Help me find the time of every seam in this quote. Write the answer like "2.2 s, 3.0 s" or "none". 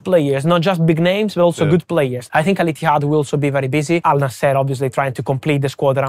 2.2 s, 4.0 s